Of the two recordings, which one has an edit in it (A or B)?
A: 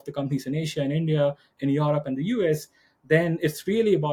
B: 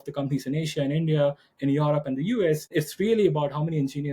B